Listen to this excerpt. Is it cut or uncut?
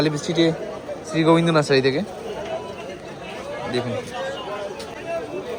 uncut